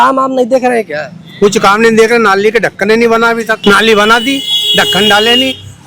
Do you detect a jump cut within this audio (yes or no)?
yes